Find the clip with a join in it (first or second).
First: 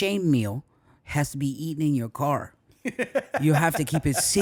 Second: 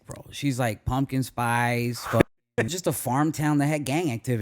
second